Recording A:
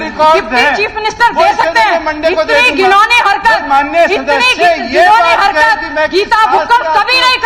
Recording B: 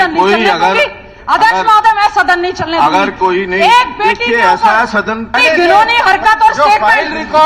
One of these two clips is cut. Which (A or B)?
B